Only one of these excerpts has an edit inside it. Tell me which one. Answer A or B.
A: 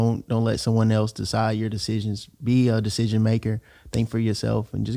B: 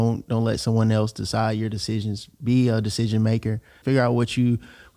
B